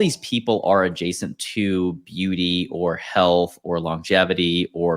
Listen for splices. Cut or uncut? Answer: uncut